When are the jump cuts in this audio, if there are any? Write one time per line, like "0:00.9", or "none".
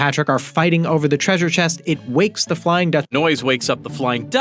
0:03.1